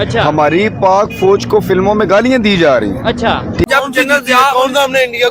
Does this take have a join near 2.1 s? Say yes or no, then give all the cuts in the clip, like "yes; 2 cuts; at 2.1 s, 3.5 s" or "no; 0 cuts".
no; 1 cut; at 3.6 s